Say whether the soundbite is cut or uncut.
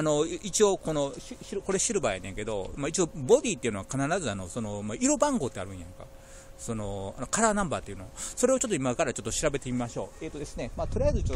cut